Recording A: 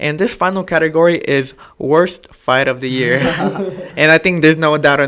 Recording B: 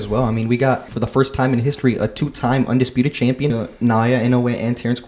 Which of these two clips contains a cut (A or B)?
B